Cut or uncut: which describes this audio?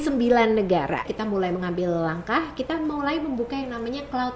cut